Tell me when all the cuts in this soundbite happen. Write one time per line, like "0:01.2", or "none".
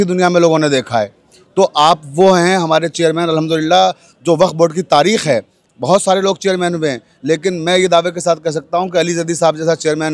none